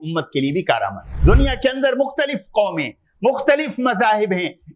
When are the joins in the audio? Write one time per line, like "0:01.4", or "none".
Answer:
0:01.1